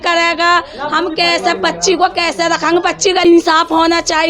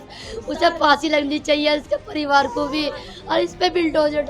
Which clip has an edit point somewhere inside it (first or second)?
first